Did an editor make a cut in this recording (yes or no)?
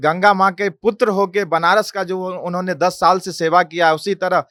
no